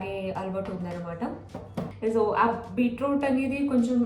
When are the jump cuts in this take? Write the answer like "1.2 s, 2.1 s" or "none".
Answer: 1.8 s

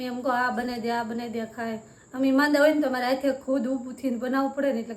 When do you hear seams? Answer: none

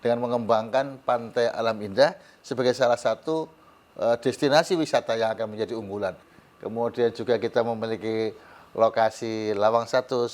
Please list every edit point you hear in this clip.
6.3 s

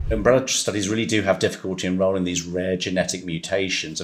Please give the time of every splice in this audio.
none

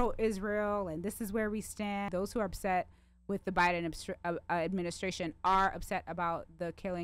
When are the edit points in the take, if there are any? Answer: 2.1 s

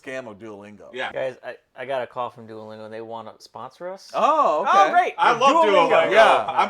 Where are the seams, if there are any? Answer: 1.1 s

